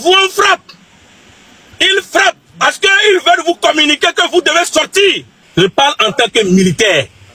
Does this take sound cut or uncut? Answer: cut